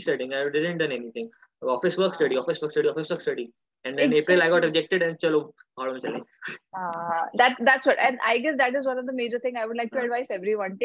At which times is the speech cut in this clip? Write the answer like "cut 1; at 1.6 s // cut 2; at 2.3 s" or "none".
none